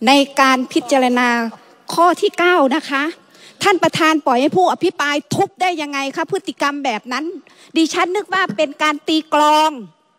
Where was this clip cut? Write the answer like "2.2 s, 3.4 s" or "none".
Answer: none